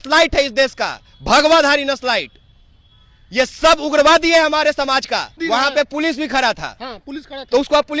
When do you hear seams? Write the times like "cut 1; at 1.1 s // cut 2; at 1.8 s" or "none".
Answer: cut 1; at 5.4 s